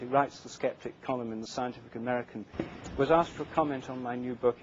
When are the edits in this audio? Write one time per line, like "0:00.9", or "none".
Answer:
0:02.9